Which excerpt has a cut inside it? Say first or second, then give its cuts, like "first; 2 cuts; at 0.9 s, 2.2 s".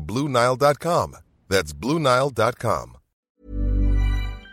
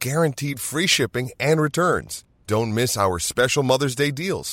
first; 1 cut; at 3.3 s